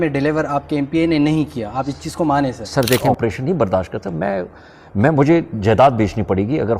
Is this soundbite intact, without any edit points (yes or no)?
no